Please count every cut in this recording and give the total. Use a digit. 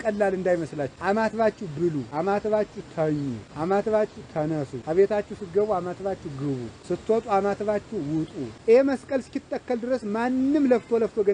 6